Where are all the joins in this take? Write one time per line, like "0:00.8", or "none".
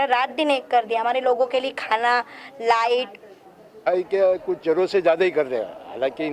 0:03.8

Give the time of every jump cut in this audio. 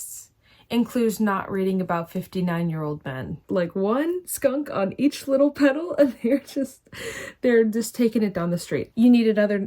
0:03.4
0:08.9

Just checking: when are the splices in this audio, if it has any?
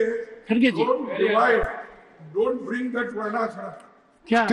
none

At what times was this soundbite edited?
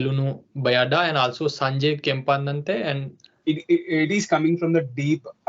0:03.3

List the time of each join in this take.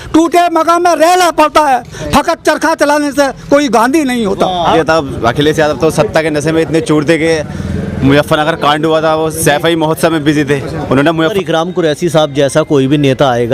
0:04.7
0:11.3

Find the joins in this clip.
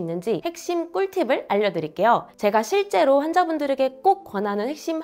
none

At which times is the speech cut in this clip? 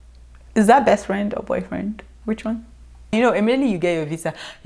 0:03.1

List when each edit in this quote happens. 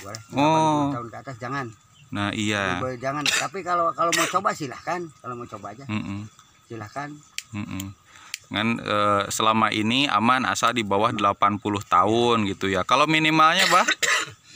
none

